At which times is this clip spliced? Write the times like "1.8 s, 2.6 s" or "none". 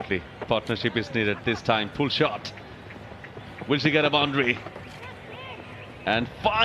none